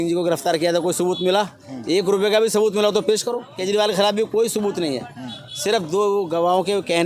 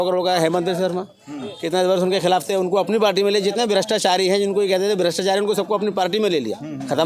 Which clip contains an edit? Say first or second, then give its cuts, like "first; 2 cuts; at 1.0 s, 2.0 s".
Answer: first; 1 cut; at 3.5 s